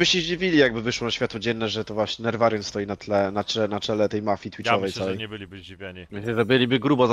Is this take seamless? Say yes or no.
yes